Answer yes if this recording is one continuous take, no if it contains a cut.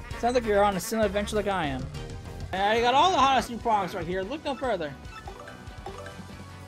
no